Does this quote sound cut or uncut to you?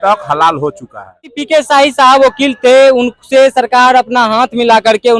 cut